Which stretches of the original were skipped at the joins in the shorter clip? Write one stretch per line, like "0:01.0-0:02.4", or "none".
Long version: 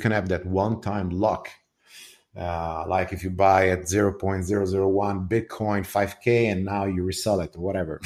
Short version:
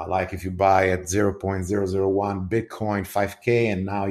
none